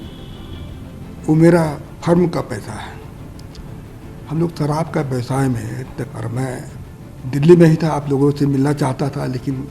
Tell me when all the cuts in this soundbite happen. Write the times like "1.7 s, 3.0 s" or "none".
6.0 s